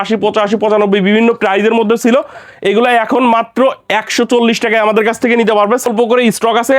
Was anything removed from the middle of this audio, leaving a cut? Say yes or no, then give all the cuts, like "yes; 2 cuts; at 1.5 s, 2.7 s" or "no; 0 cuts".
yes; 1 cut; at 5.9 s